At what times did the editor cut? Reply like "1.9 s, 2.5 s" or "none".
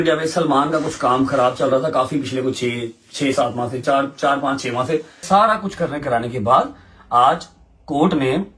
5.2 s